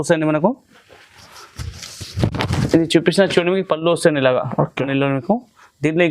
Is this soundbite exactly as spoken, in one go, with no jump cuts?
no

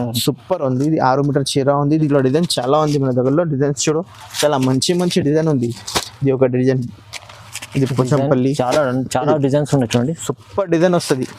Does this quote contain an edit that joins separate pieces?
yes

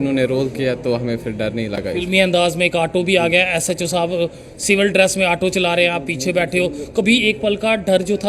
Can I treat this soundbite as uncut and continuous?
yes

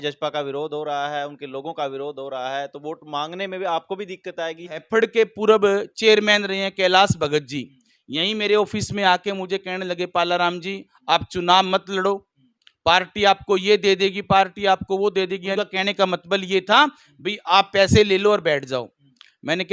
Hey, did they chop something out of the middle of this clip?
yes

